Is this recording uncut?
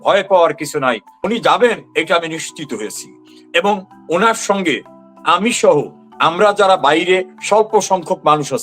no; 1 cut; at 1.2 s

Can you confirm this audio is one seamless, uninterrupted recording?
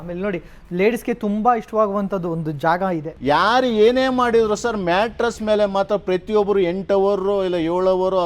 no; 1 cut; at 3.1 s

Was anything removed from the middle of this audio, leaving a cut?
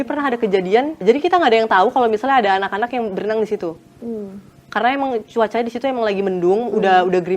yes; 1 cut; at 1.0 s

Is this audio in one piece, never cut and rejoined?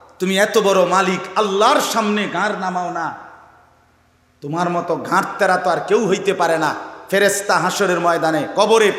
yes; 0 cuts

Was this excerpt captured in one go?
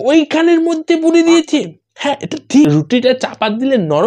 no; 1 cut; at 2.7 s

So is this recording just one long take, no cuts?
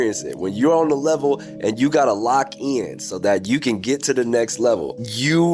yes; 0 cuts

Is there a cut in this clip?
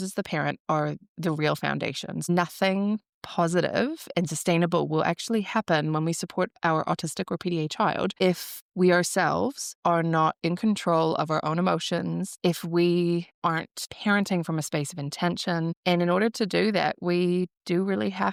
no; 0 cuts

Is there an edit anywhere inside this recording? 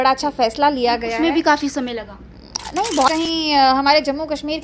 yes; 1 cut; at 3.2 s

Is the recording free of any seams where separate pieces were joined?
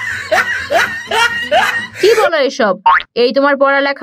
yes; 0 cuts

